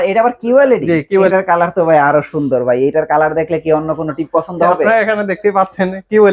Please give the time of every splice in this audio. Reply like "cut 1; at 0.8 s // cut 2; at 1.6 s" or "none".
cut 1; at 1.3 s